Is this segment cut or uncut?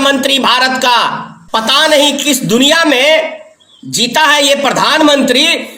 cut